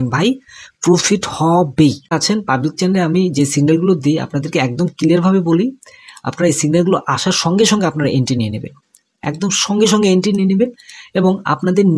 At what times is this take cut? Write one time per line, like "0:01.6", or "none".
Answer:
0:02.2